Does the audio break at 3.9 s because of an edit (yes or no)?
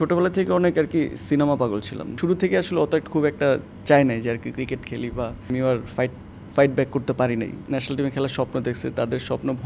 no